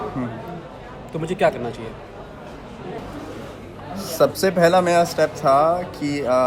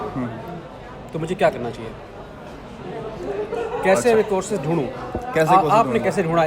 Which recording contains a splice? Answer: first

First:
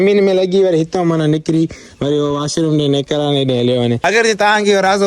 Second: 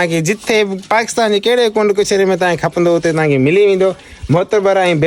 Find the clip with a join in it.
first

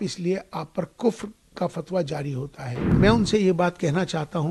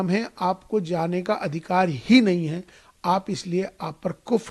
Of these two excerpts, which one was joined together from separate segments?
first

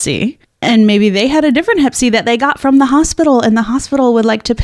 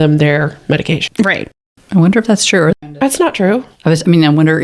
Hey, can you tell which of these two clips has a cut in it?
second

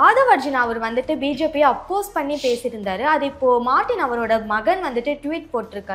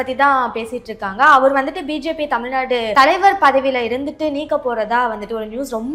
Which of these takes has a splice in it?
second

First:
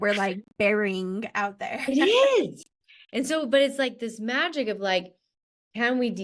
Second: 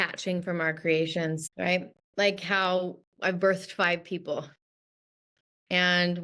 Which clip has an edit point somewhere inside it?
second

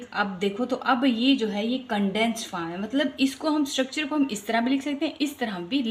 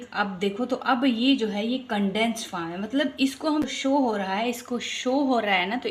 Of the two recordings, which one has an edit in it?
second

